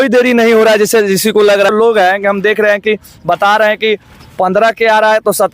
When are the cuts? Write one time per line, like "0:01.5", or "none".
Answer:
0:01.7